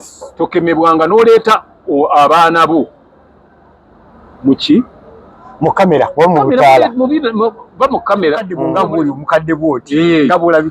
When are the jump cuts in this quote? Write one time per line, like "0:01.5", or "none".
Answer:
0:08.6